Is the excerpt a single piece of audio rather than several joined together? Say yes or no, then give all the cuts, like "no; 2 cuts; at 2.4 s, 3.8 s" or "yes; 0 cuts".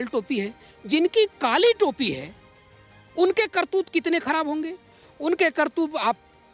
yes; 0 cuts